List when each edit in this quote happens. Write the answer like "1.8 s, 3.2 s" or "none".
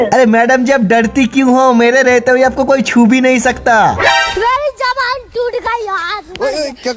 4.3 s